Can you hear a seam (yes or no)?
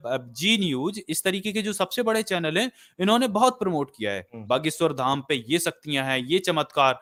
no